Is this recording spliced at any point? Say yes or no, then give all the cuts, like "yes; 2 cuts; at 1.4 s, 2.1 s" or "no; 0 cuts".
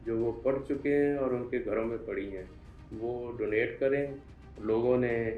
yes; 1 cut; at 4.2 s